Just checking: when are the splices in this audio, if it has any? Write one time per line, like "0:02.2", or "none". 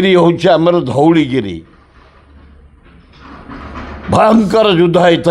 none